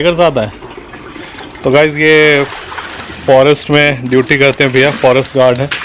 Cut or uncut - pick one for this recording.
uncut